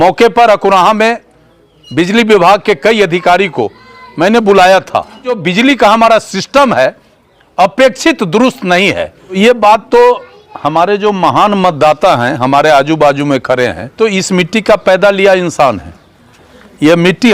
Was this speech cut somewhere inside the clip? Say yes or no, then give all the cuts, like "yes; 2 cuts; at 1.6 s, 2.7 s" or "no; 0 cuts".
yes; 3 cuts; at 5.4 s, 9.4 s, 13.9 s